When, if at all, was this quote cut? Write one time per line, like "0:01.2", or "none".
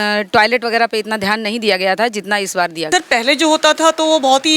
0:02.8